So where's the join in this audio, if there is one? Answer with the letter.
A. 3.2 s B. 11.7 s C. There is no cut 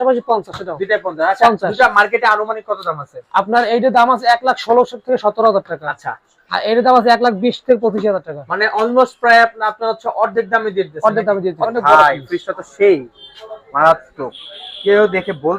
B